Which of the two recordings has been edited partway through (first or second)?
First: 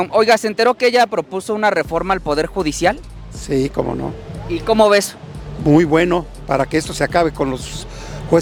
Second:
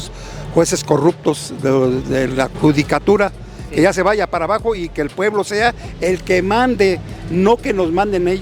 second